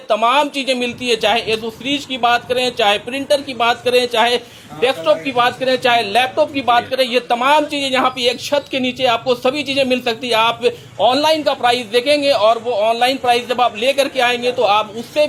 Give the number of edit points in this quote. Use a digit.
0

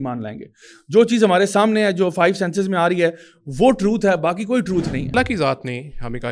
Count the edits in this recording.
1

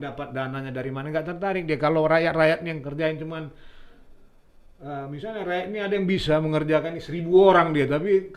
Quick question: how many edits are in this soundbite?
0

